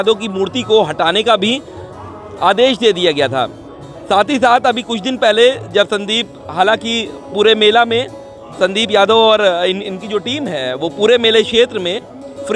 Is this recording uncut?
yes; 0 cuts

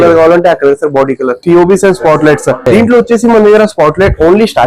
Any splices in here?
yes; 2 cuts; at 1.4 s, 2.6 s

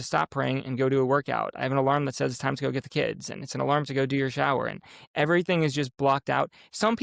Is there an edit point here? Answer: no; 0 cuts

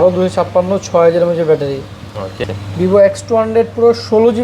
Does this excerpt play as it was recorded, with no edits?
no; 1 cut; at 2.4 s

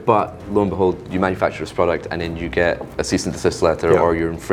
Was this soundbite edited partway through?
no; 0 cuts

